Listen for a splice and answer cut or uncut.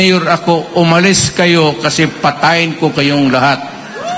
uncut